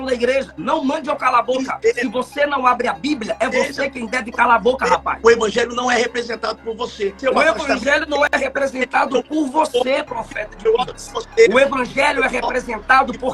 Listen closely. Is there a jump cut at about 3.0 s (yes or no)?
no